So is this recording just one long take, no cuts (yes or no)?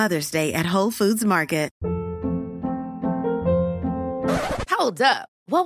no